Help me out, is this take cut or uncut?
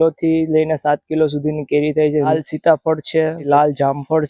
cut